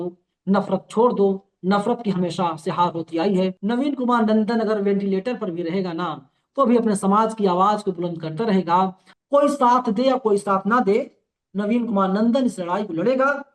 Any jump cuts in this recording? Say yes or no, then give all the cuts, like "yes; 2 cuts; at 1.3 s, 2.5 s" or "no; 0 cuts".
yes; 2 cuts; at 3.6 s, 9.1 s